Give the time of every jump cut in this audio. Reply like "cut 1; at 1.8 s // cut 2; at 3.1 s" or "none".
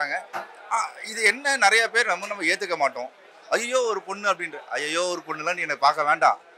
none